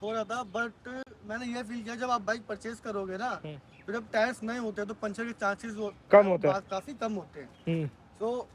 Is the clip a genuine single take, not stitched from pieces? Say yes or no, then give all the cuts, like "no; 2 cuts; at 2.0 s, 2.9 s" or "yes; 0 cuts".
yes; 0 cuts